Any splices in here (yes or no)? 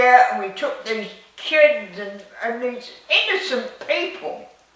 no